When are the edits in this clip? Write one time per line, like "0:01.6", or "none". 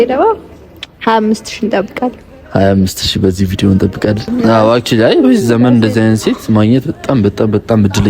0:04.2

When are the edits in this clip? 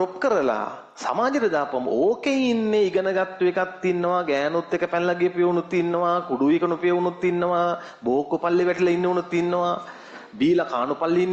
none

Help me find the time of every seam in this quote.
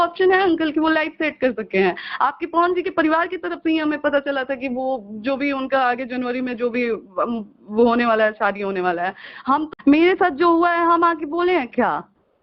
0:09.7

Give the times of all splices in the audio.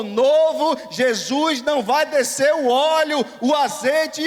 none

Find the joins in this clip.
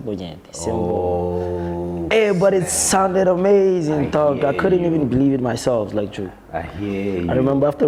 none

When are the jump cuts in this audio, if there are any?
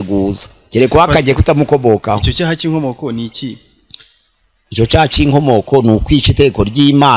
none

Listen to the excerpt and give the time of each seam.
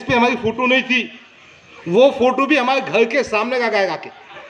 none

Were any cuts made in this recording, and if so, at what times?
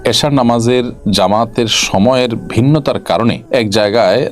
0:01.0
0:03.4

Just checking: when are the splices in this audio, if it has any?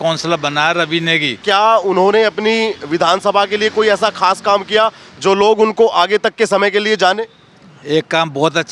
0:01.4

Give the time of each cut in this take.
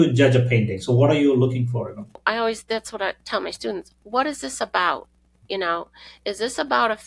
0:02.2

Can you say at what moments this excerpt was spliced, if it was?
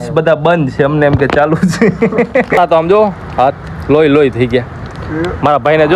0:02.6

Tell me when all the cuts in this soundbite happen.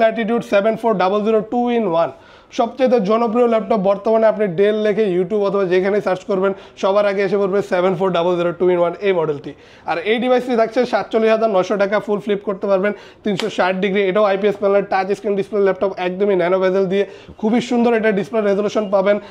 none

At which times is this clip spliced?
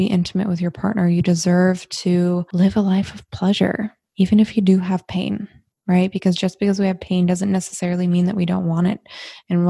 0:02.5

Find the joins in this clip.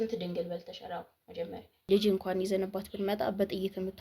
0:01.9

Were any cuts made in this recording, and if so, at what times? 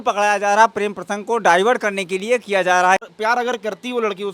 0:03.1

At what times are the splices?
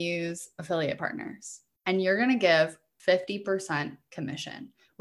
0:02.9

